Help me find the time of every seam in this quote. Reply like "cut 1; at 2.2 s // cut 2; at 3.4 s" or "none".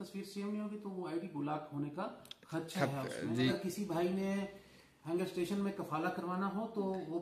cut 1; at 3.5 s

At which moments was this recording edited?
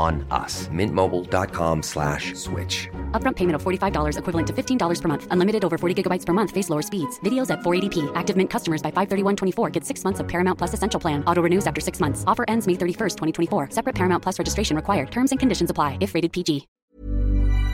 cut 1; at 16.7 s

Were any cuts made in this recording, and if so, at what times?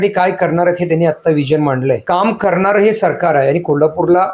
cut 1; at 2.0 s

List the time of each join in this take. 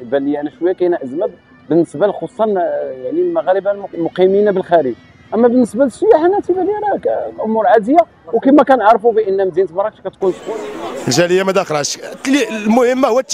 cut 1; at 10.5 s

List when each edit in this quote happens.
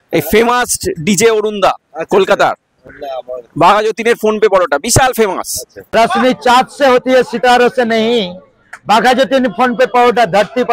none

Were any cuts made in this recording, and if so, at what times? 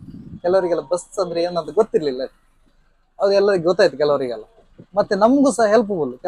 none

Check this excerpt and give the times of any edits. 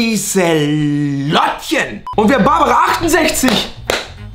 cut 1; at 2.1 s

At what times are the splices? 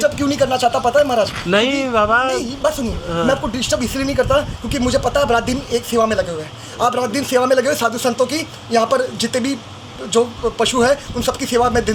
none

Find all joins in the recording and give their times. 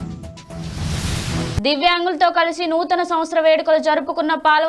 cut 1; at 1.6 s

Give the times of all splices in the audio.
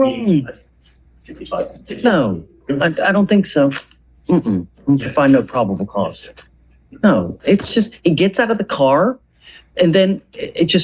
cut 1; at 1.7 s

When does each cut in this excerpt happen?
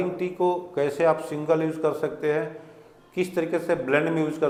none

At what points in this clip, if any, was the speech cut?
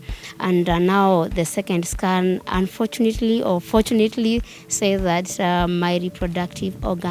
none

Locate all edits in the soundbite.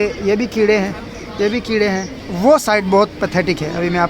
cut 1; at 2.2 s

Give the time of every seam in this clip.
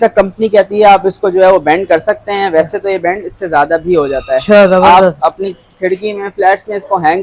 none

